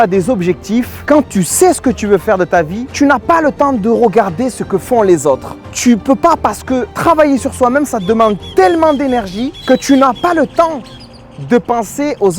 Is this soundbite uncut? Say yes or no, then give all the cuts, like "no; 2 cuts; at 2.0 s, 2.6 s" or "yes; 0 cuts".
yes; 0 cuts